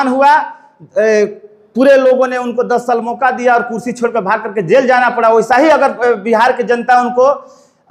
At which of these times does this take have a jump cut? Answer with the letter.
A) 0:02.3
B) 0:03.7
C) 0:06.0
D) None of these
D